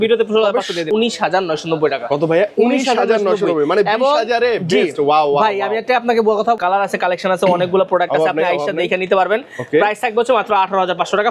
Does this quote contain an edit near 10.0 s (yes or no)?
no